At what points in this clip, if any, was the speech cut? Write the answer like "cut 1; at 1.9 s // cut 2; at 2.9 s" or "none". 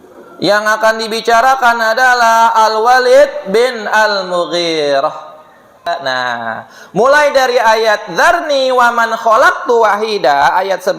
cut 1; at 5.9 s